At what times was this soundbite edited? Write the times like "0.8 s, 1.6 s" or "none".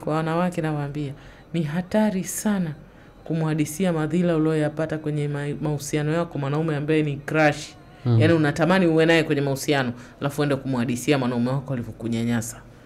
none